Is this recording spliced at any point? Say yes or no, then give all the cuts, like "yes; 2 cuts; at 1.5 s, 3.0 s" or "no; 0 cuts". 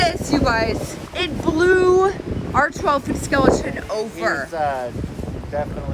yes; 1 cut; at 1.0 s